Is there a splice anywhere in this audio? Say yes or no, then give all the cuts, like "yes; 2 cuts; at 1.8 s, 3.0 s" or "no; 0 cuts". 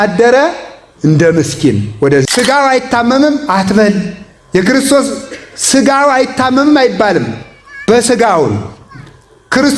yes; 1 cut; at 2.2 s